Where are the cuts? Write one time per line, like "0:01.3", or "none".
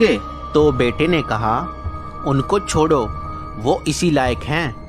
none